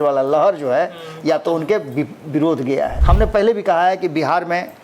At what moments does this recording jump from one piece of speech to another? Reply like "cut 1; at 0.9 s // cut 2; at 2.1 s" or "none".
cut 1; at 3.0 s